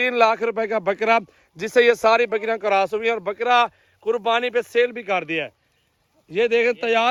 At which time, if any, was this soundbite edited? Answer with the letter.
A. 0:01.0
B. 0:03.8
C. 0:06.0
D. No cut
D